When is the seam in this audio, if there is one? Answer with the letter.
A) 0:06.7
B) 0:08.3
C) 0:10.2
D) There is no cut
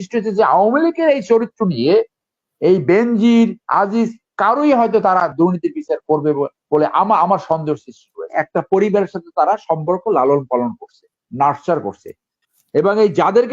B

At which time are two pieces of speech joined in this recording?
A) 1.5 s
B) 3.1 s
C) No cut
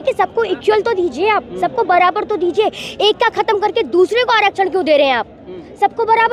C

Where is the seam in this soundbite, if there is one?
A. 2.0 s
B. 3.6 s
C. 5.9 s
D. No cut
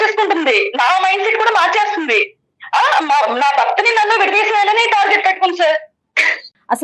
D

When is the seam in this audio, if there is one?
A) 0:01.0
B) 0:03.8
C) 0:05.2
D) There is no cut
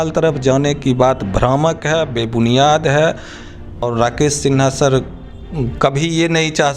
B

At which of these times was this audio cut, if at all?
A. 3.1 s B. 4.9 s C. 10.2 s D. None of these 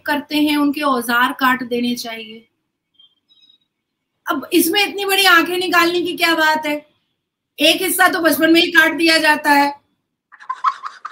D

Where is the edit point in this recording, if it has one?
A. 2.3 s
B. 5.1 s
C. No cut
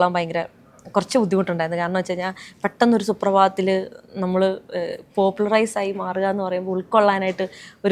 C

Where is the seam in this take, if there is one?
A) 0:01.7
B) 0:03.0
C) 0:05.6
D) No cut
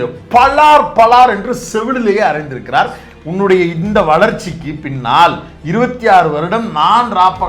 B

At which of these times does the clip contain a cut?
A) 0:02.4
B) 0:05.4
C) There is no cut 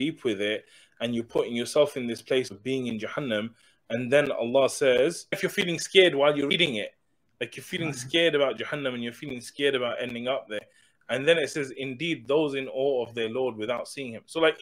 B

